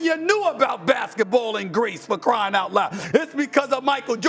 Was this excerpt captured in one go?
yes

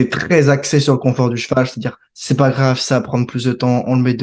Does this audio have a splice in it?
no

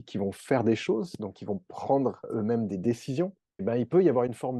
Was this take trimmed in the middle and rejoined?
yes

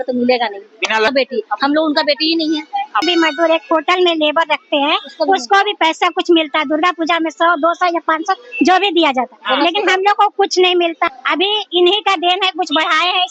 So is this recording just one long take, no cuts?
no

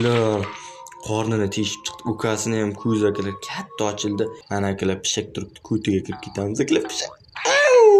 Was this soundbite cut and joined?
yes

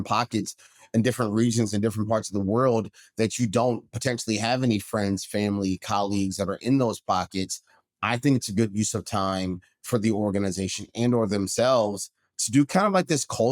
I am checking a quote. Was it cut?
no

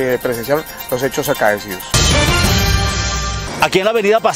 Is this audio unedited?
no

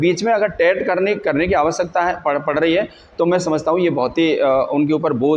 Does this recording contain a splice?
no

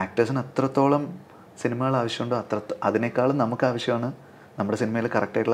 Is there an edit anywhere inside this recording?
no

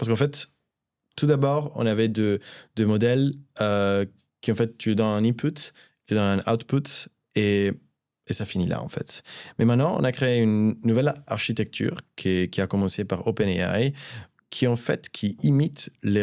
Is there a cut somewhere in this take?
no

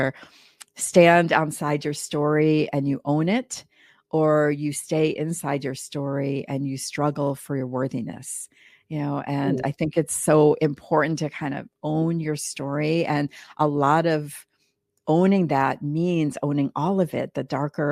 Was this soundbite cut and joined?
no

